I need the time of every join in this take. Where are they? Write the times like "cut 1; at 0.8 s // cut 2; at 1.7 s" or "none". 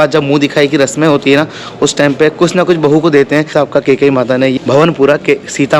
none